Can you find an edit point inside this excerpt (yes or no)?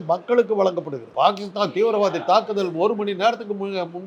yes